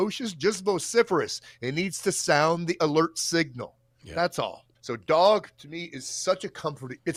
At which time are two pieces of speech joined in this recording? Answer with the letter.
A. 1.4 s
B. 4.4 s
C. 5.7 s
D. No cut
D